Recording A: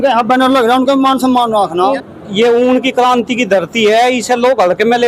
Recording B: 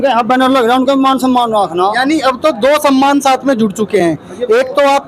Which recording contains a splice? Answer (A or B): A